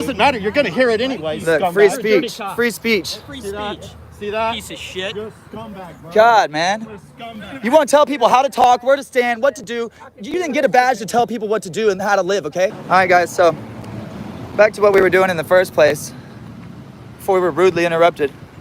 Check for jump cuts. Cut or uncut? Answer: cut